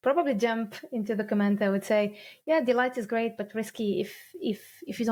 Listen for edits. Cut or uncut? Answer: uncut